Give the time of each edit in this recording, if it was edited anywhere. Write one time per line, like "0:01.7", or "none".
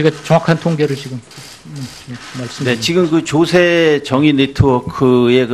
none

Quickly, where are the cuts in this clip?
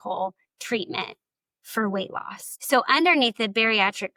none

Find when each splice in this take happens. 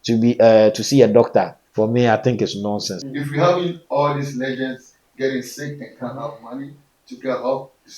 0:01.6
0:02.9

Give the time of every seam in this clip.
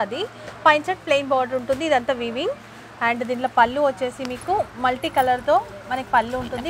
none

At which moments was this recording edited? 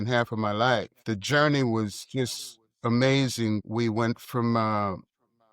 0:01.0
0:03.6

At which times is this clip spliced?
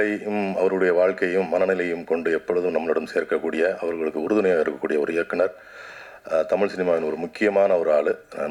none

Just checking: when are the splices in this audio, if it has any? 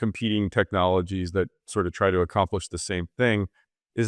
none

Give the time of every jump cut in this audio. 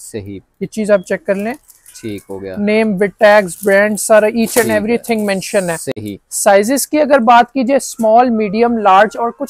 none

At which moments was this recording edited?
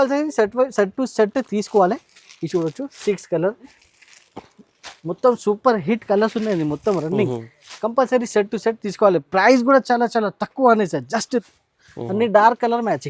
0:03.8
0:11.5

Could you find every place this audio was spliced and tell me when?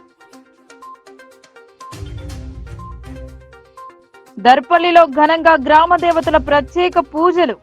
0:01.4
0:04.1

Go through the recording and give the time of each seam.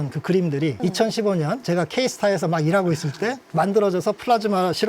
0:03.5

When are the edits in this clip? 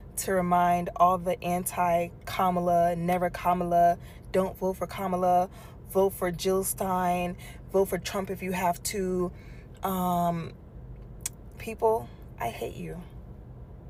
none

